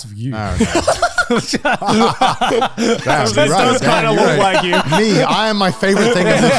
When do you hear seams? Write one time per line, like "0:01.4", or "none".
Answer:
none